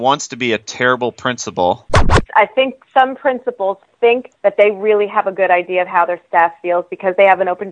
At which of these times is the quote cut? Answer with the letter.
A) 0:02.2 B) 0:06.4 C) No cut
A